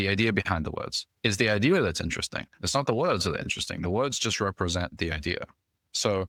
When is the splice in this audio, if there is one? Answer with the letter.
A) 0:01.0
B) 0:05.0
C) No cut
C